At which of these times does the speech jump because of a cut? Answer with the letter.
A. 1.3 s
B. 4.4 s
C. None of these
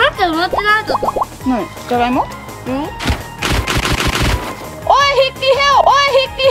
A